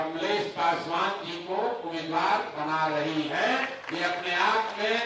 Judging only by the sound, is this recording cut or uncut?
uncut